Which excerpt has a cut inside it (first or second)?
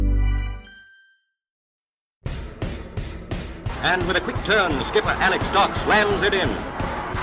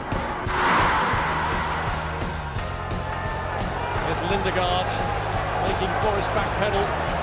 first